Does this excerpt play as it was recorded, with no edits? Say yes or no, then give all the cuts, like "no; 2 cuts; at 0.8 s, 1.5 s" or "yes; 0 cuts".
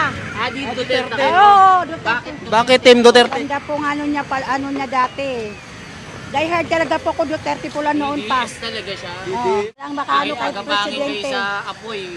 no; 1 cut; at 9.8 s